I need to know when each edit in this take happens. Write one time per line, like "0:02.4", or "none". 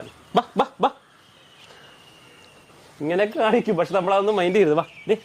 none